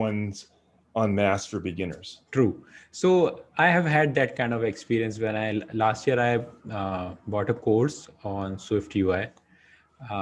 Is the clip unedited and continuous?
yes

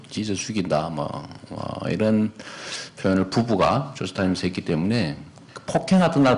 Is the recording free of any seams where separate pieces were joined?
yes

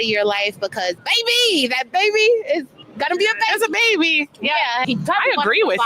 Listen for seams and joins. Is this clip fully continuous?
no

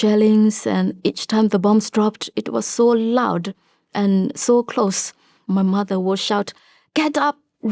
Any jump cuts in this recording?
yes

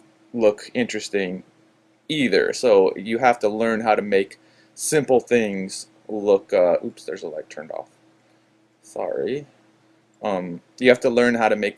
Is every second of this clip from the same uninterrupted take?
yes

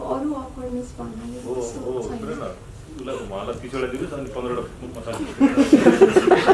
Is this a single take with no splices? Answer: yes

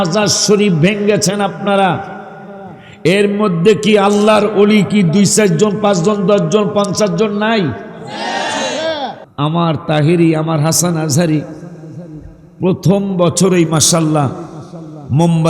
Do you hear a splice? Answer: yes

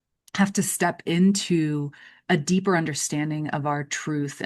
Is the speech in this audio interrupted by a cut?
no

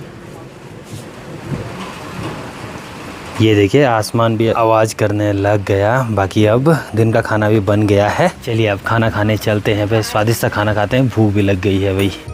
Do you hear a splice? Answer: no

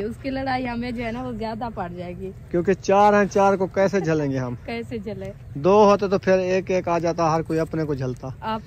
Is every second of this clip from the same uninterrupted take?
yes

